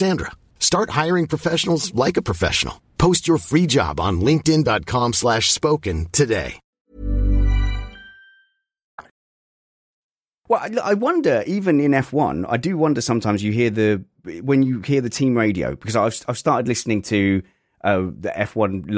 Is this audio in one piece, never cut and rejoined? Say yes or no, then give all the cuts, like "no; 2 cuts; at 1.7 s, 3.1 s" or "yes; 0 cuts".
yes; 0 cuts